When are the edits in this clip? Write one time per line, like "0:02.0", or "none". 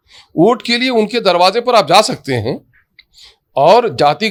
none